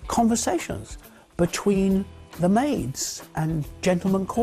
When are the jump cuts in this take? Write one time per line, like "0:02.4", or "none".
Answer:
0:02.2